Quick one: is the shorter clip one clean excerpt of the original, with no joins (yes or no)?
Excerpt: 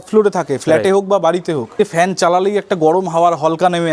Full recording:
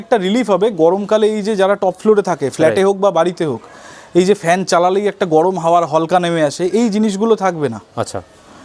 no